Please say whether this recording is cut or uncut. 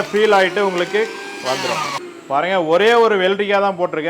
cut